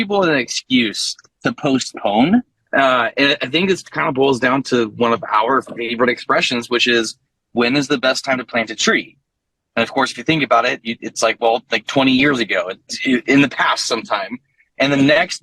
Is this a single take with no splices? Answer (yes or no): no